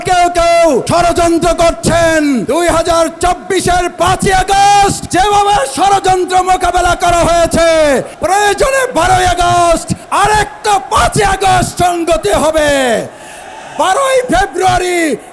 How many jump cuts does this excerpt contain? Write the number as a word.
five